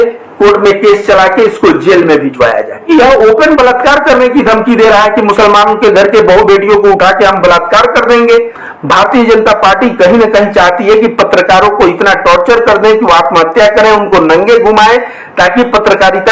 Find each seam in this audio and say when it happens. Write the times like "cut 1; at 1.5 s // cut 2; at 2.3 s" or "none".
cut 1; at 2.9 s // cut 2; at 8.6 s

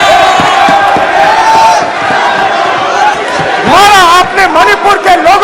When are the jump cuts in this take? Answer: cut 1; at 3.1 s

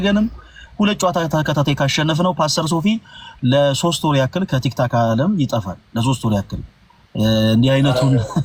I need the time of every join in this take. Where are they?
none

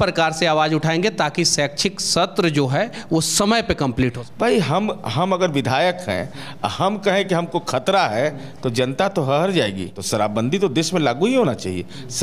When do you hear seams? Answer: cut 1; at 4.2 s // cut 2; at 9.9 s

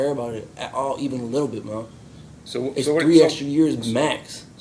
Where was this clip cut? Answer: none

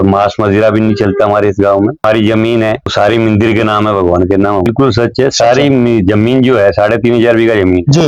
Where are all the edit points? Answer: cut 1; at 2.0 s // cut 2; at 2.9 s // cut 3; at 4.7 s

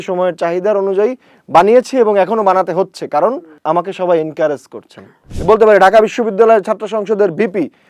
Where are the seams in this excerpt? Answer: cut 1; at 3.6 s // cut 2; at 5.3 s

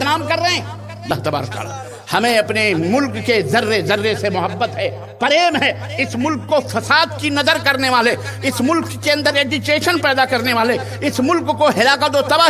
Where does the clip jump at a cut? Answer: cut 1; at 1.1 s

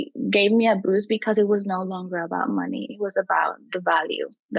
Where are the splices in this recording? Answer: none

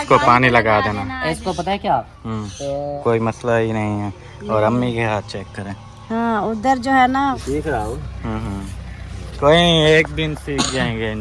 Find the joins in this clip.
cut 1; at 3.0 s // cut 2; at 7.4 s

